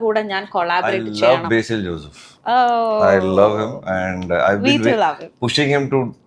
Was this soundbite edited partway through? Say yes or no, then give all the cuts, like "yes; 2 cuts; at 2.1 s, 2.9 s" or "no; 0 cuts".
no; 0 cuts